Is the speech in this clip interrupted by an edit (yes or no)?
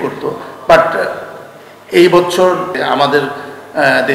yes